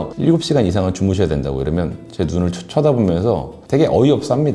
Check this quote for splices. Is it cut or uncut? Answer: cut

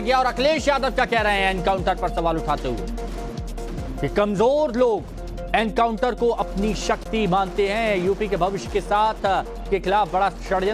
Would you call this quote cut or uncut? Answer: uncut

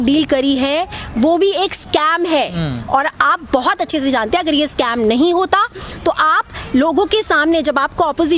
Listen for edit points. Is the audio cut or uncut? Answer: uncut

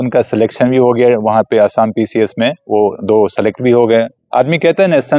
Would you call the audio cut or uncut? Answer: cut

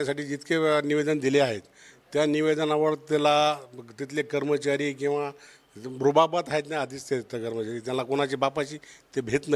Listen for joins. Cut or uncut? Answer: uncut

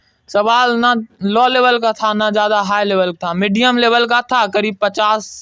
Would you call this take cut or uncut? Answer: uncut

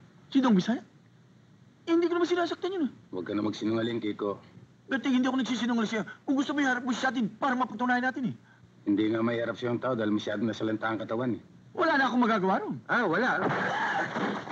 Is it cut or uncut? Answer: uncut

